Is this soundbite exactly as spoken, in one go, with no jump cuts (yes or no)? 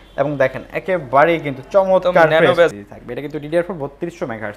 no